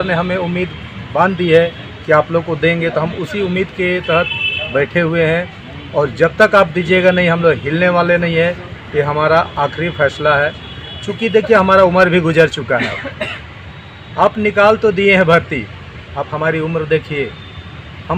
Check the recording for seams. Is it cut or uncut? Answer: uncut